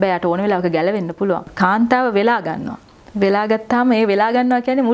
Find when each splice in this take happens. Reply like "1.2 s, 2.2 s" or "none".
1.5 s